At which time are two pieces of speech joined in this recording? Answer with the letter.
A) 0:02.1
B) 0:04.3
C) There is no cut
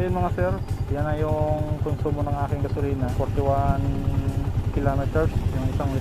C